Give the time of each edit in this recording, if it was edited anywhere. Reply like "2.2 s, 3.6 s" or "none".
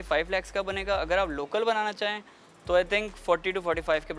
none